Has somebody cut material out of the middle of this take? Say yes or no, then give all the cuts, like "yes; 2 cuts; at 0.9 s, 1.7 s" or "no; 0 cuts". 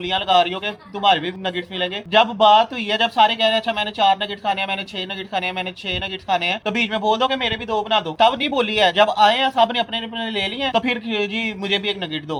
no; 0 cuts